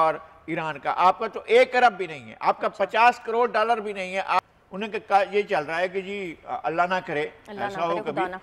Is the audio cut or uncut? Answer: cut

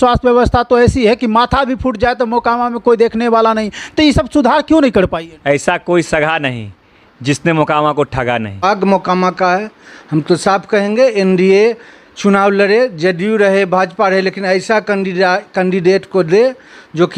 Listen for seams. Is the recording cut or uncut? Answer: cut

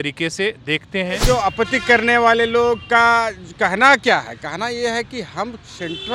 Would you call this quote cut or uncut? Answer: cut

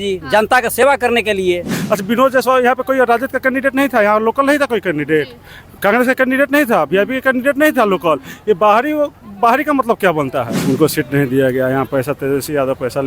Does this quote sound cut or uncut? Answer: cut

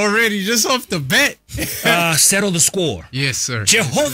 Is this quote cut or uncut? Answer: cut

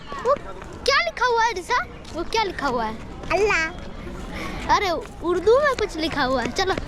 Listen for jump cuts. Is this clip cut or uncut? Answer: uncut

